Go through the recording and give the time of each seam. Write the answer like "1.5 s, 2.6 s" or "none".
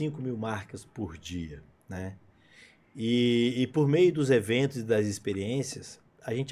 none